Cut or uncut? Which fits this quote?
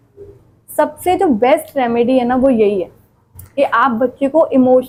uncut